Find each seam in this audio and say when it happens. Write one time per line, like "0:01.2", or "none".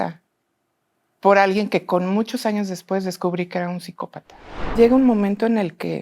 0:04.7